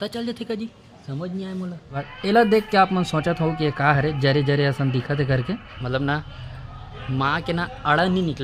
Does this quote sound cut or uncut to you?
cut